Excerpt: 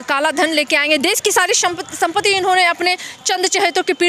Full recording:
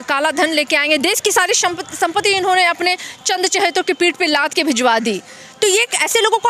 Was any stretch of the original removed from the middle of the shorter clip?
no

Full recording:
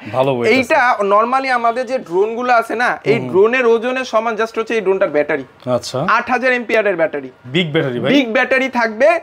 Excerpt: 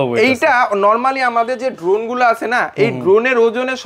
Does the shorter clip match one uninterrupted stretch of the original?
yes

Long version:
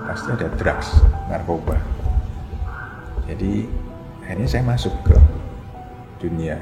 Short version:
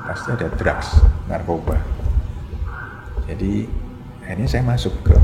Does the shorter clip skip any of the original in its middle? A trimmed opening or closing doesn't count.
no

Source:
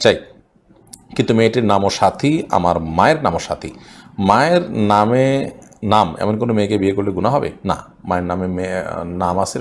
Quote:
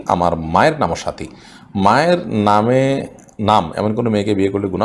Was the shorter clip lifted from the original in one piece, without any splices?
yes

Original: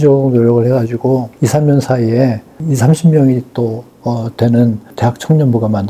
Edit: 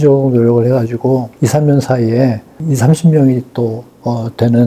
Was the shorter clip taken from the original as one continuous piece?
yes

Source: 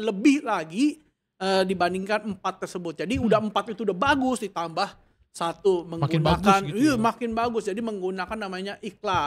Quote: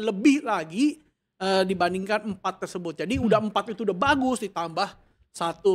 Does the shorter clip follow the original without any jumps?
yes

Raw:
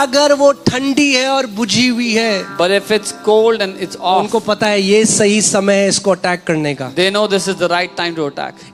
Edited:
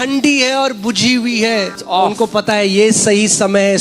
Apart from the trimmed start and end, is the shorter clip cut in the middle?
yes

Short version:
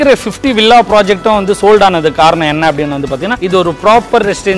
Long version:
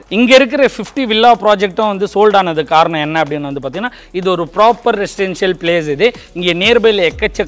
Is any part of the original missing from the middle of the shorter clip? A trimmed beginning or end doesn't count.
yes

